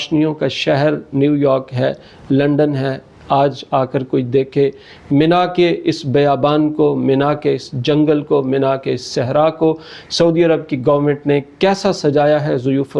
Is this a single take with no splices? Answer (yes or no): yes